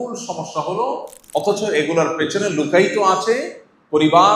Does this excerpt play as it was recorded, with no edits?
no; 1 cut; at 1.1 s

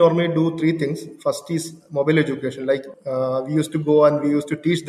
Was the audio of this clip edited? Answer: yes; 1 cut; at 2.9 s

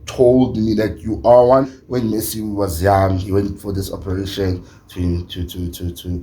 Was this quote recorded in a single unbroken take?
no; 1 cut; at 1.8 s

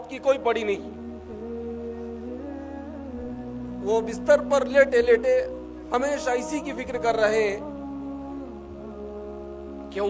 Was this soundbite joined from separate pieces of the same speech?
no; 0 cuts

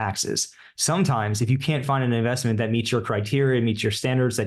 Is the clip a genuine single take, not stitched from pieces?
no; 1 cut; at 1.8 s

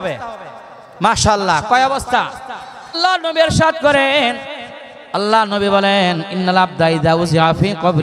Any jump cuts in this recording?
yes; 1 cut; at 3.0 s

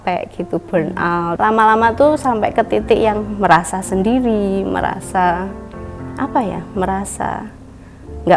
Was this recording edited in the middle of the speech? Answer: yes; 1 cut; at 1.4 s

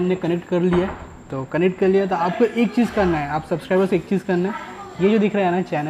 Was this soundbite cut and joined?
no; 0 cuts

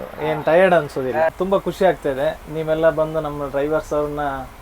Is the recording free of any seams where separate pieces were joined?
no; 1 cut; at 1.6 s

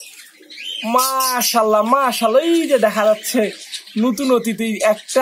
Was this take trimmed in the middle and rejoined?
no; 0 cuts

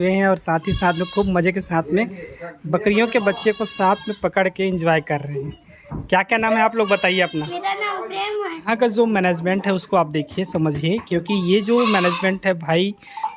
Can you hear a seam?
yes; 1 cut; at 8.6 s

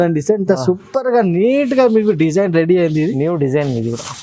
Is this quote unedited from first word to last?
yes; 0 cuts

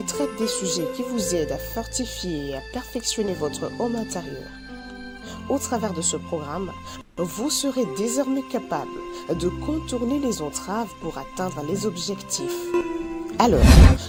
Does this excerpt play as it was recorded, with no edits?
yes; 0 cuts

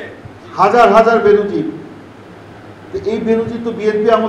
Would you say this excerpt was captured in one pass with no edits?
yes; 0 cuts

